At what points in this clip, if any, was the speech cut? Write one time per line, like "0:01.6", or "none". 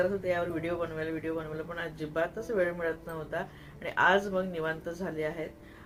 none